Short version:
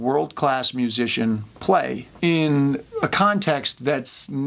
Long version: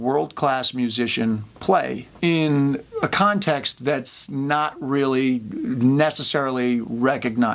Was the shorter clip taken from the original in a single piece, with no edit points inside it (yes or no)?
yes